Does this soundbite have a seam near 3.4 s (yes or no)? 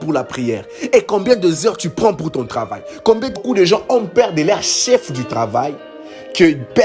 yes